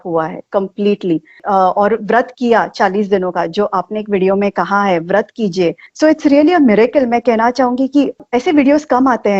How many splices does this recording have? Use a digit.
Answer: 3